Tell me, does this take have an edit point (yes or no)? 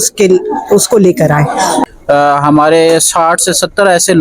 yes